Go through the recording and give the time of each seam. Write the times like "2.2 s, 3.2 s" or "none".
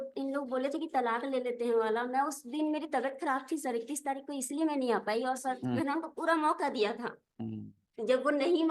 5.6 s